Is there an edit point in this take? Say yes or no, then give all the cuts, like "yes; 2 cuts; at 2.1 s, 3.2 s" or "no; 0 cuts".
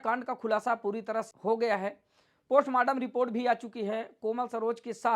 yes; 1 cut; at 1.3 s